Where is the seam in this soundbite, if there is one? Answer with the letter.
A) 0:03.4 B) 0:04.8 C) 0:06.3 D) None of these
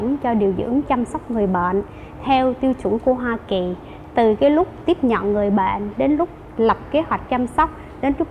B